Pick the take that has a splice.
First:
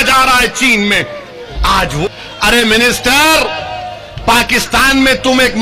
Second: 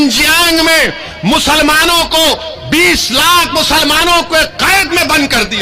first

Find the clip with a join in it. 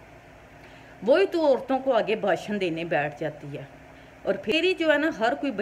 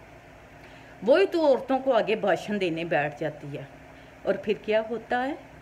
first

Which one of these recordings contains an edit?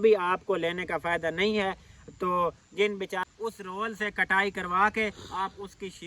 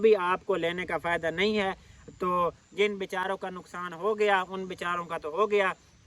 first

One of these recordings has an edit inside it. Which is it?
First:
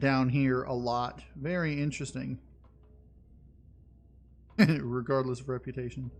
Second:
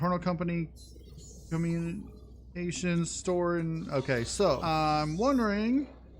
second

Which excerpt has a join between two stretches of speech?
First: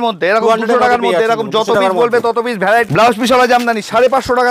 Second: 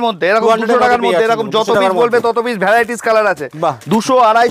first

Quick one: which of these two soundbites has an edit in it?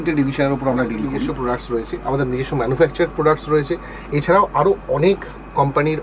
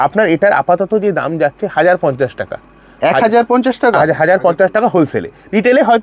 first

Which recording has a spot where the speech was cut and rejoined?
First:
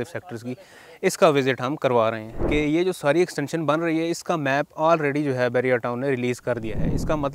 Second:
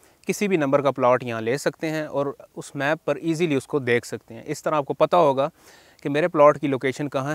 first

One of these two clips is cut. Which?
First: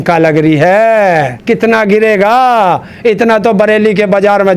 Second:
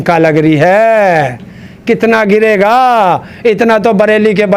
first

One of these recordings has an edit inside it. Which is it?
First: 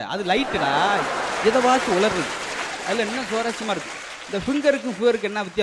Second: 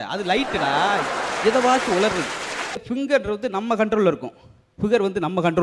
second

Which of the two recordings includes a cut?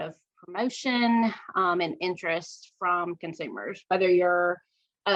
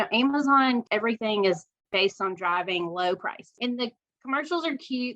second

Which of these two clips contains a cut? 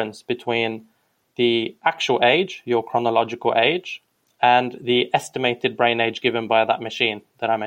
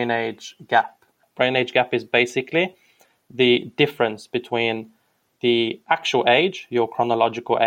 second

